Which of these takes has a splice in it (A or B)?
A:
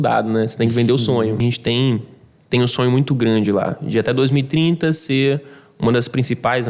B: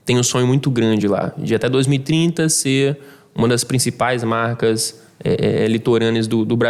A